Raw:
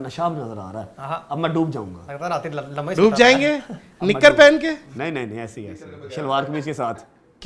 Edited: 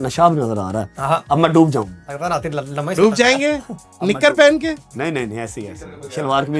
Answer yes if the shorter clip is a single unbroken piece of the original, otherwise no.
yes